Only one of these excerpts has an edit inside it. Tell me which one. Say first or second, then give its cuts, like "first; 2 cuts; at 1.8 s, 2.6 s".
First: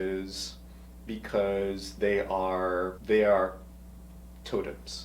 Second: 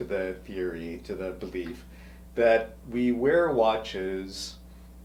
first; 1 cut; at 3.0 s